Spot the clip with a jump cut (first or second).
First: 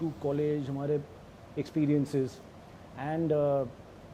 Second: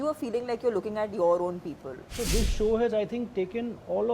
second